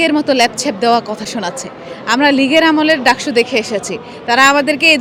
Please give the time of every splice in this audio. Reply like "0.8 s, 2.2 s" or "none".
none